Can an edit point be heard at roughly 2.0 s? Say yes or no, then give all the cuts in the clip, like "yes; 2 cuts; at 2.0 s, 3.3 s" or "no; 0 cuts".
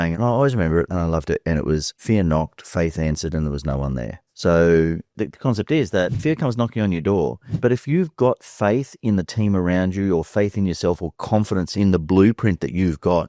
yes; 3 cuts; at 2.0 s, 5.1 s, 6.2 s